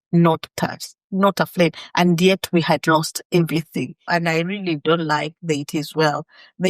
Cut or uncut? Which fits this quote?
cut